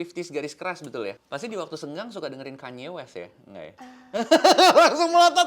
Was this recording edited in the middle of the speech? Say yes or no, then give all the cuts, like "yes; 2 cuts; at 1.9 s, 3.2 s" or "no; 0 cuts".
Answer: yes; 1 cut; at 1.2 s